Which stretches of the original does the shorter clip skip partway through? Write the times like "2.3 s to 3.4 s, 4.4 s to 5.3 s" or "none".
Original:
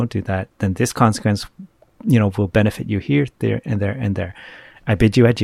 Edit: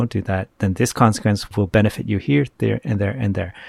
1.5 s to 2.3 s